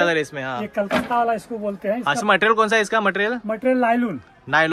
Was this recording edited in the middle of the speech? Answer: no; 0 cuts

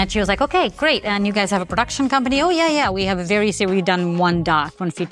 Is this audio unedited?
yes; 0 cuts

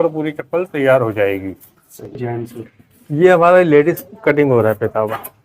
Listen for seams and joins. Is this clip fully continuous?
no; 1 cut; at 2.2 s

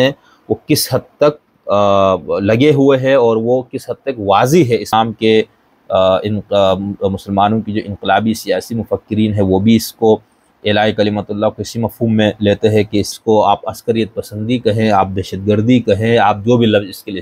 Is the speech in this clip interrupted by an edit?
yes; 2 cuts; at 4.9 s, 13.1 s

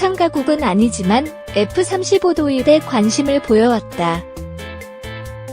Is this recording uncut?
no; 1 cut; at 4.2 s

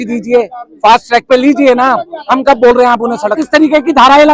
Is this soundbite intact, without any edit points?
no; 1 cut; at 3.4 s

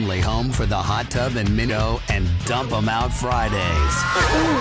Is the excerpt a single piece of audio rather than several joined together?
no; 1 cut; at 1.7 s

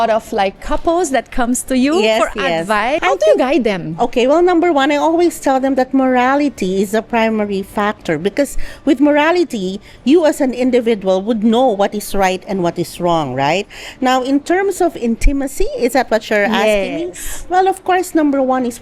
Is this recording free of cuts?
no; 1 cut; at 3.0 s

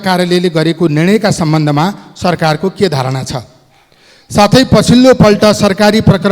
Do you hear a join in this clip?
no; 0 cuts

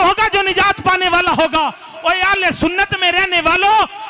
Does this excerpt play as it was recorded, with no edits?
yes; 0 cuts

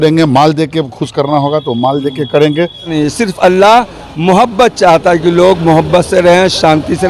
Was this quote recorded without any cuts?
no; 1 cut; at 2.9 s

